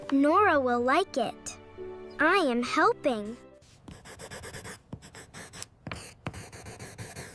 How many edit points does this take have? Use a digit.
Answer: 1